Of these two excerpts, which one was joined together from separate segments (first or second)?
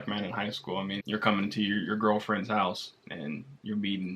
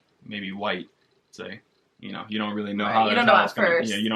first